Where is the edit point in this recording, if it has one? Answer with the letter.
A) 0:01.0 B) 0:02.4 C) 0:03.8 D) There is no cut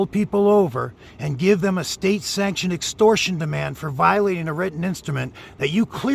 D